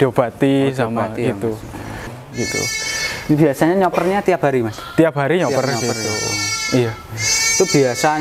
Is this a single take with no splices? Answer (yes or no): no